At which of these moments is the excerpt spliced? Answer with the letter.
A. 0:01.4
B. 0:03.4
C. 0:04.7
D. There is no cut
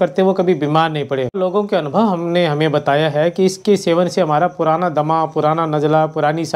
A